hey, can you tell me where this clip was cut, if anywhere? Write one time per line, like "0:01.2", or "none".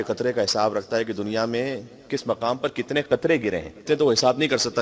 0:03.8